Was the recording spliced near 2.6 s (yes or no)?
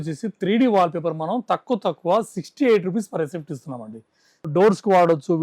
no